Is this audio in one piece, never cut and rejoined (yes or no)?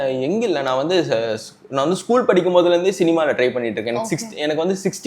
yes